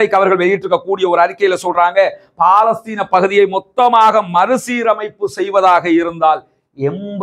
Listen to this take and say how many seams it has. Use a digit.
0